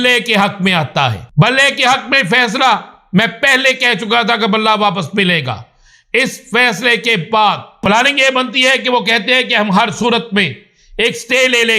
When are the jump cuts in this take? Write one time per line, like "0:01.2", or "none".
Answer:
0:01.2
0:07.8